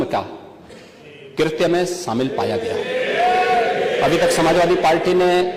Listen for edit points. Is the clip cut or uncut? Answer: uncut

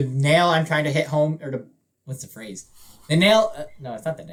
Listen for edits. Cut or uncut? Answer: uncut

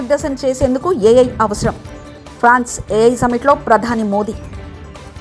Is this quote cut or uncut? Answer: uncut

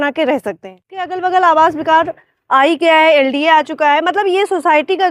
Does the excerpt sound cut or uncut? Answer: cut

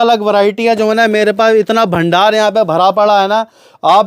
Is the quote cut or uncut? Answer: uncut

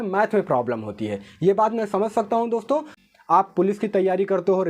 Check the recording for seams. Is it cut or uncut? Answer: cut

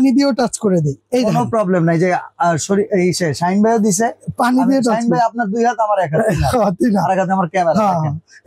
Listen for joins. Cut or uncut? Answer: uncut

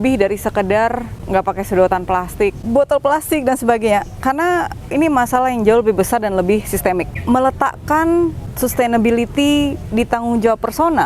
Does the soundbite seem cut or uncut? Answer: cut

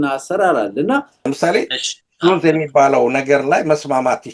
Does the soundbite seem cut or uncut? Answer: cut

